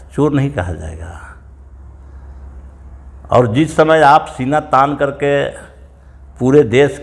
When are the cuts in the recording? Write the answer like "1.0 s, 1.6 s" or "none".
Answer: none

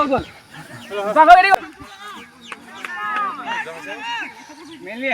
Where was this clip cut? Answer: 1.5 s

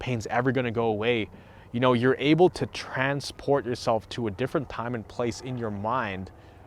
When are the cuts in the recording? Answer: none

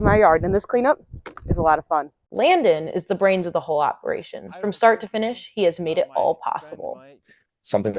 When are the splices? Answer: none

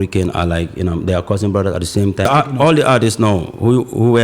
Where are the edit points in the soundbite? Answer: 2.3 s

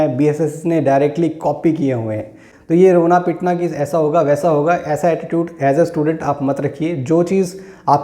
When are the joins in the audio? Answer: 2.2 s

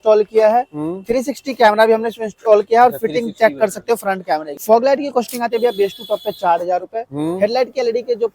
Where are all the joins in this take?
4.5 s

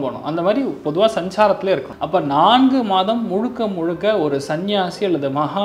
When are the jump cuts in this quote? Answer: 1.9 s

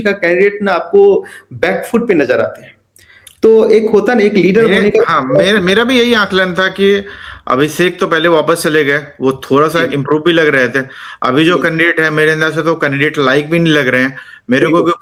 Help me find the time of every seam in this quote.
none

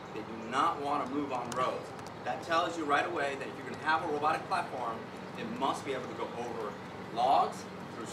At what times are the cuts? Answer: 7.0 s

